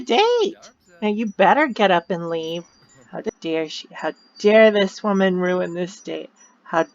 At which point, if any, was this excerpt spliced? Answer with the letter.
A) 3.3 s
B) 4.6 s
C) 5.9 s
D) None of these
A